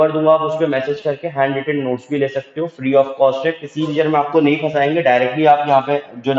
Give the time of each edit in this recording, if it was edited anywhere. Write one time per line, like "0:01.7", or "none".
0:03.9